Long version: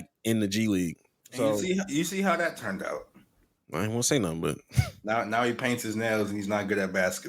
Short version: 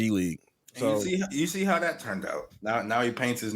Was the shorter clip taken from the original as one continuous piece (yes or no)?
no